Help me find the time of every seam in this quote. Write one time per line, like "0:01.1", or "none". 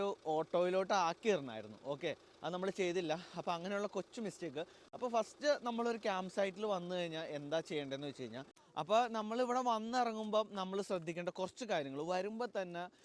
0:08.6